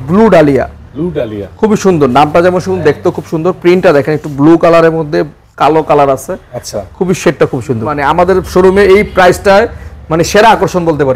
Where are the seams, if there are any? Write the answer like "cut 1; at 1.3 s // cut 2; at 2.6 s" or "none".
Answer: cut 1; at 7.9 s

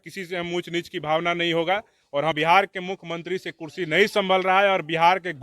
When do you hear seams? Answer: cut 1; at 2.4 s

